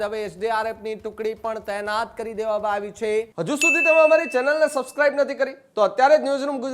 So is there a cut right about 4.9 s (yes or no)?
no